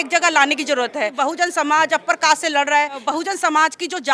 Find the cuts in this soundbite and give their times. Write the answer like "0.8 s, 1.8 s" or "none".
1.1 s, 3.0 s